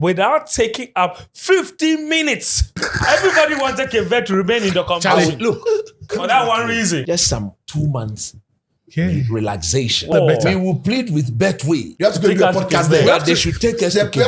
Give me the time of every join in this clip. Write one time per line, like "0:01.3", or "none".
0:02.9
0:07.0
0:10.1
0:11.9